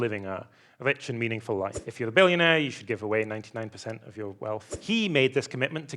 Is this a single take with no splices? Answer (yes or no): no